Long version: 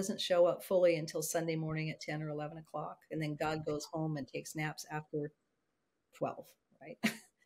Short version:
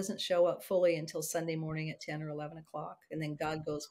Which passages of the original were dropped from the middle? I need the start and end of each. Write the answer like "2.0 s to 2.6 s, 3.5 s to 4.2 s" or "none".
none

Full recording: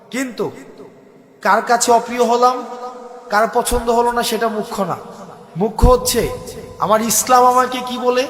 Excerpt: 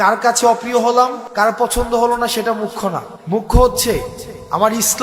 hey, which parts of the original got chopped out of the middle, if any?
2.7 s to 3.2 s, 5.1 s to 5.4 s

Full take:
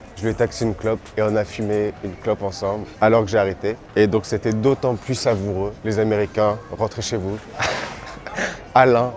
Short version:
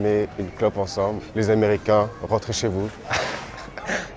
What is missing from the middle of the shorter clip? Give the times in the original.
2.9 s to 5.7 s

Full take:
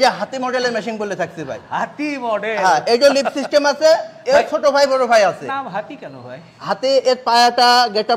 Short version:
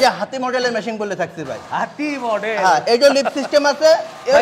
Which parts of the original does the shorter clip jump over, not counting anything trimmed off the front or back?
none

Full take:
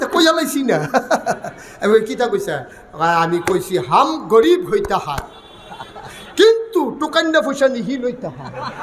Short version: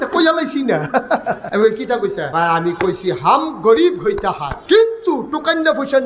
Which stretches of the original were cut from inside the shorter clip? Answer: 1.4 s to 1.7 s, 2.5 s to 2.9 s, 5.2 s to 6.2 s

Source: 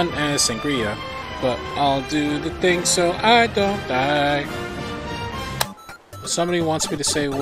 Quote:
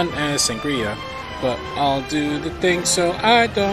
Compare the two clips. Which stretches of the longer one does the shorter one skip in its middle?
none

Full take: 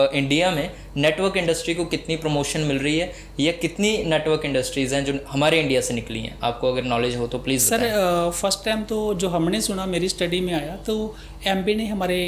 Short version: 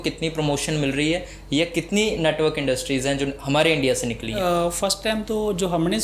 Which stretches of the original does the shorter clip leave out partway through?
6.2 s to 8.0 s

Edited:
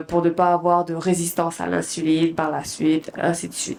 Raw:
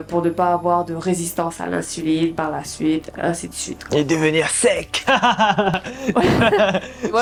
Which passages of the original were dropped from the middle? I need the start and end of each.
none

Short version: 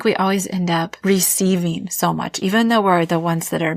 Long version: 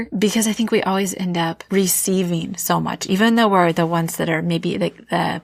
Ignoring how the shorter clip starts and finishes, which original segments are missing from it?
none

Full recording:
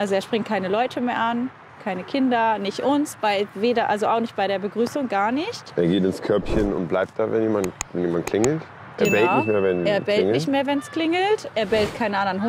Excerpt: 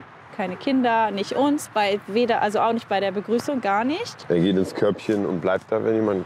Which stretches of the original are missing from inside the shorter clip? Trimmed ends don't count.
none

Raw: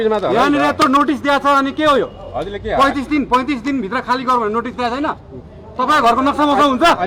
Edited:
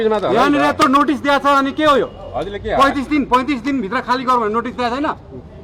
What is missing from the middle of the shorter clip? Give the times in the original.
none

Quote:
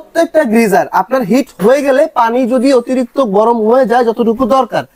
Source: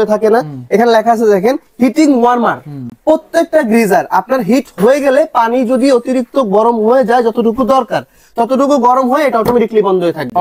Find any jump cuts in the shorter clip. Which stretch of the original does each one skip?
none

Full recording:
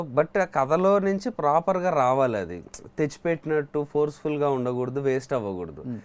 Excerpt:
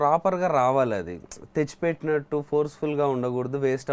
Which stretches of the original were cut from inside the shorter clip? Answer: none

